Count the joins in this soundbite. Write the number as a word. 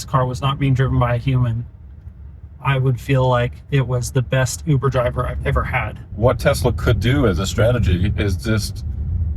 one